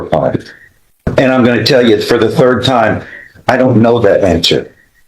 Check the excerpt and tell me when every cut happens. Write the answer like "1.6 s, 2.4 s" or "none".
1.1 s